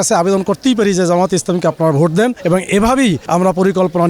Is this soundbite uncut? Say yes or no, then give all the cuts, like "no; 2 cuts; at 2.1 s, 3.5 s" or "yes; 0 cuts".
no; 2 cuts; at 2.4 s, 3.2 s